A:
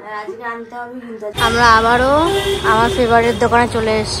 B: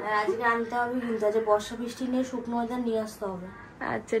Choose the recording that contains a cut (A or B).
A